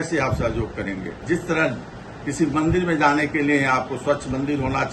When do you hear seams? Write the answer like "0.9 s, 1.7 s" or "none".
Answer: 1.1 s

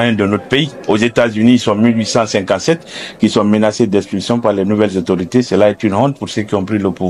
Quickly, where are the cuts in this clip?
none

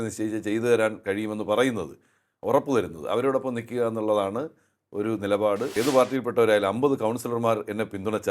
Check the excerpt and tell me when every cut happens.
5.7 s

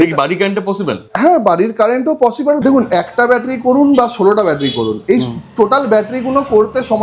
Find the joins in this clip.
1.0 s, 2.6 s

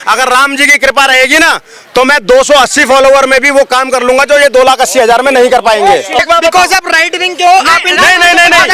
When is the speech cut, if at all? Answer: 6.2 s

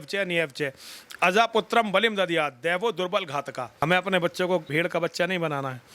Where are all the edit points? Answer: 3.8 s, 4.7 s

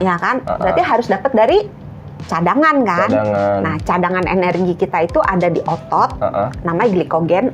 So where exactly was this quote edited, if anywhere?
none

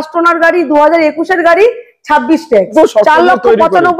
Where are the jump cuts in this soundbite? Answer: 2.7 s

